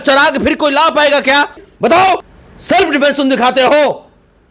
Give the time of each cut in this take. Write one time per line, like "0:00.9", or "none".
none